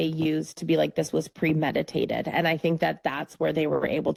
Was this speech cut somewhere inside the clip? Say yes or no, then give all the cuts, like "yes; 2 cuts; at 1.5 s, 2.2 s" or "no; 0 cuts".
no; 0 cuts